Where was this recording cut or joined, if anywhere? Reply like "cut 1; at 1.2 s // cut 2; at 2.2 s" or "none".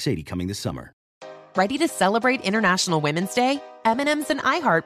cut 1; at 1.0 s